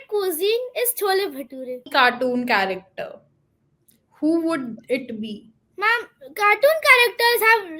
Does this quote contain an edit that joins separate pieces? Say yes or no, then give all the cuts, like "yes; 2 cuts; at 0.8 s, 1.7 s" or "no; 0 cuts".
yes; 1 cut; at 1.9 s